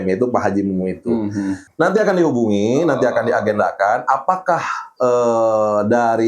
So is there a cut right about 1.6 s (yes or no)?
yes